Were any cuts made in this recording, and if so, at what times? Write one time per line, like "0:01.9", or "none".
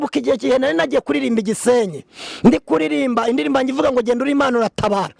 none